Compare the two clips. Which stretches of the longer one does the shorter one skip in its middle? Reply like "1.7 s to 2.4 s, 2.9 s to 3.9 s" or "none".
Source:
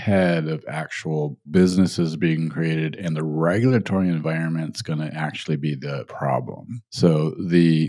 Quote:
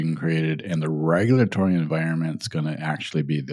none